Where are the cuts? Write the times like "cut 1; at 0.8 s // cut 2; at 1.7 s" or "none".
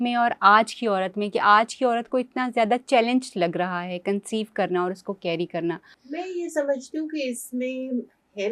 cut 1; at 5.9 s